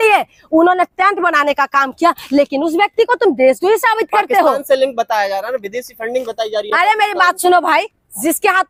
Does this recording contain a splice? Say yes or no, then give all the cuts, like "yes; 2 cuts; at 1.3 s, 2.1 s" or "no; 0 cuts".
no; 0 cuts